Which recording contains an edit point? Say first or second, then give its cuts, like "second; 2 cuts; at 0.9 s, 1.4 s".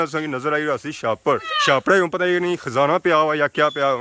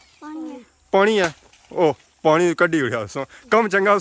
first; 1 cut; at 1.5 s